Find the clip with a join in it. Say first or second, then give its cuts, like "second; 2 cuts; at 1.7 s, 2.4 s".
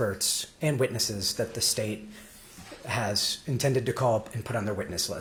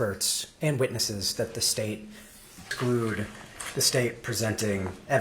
second; 1 cut; at 2.7 s